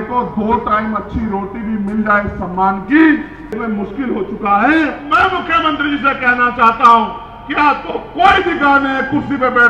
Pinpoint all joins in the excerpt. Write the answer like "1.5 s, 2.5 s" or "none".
3.6 s, 5.0 s